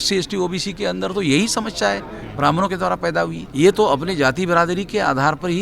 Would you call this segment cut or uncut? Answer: cut